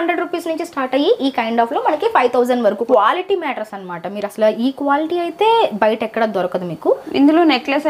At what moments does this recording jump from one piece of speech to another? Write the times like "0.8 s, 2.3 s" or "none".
2.8 s, 7.1 s